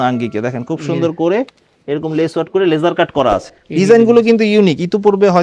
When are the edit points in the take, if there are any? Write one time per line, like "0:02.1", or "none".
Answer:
0:03.5